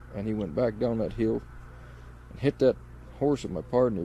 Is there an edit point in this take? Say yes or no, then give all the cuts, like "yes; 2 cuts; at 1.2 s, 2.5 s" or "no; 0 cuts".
no; 0 cuts